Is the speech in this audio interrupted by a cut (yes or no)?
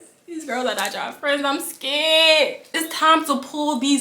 yes